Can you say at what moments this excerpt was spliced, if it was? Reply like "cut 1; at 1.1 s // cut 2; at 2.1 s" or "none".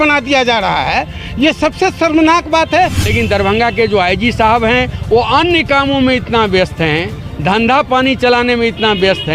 cut 1; at 3.0 s